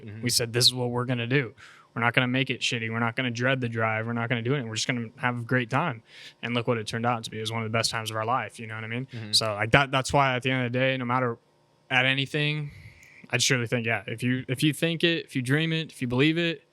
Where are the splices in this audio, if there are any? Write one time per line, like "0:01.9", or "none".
0:09.2